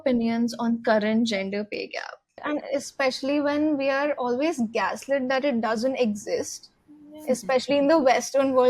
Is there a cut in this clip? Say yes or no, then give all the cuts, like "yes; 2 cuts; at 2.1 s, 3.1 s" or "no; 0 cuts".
yes; 1 cut; at 2.4 s